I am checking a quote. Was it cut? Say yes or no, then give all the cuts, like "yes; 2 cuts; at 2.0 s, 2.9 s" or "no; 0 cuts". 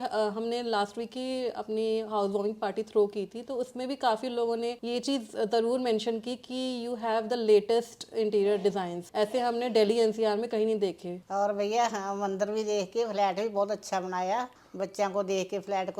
yes; 2 cuts; at 11.2 s, 14.6 s